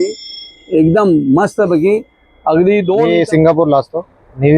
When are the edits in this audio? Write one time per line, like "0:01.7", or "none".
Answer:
0:03.1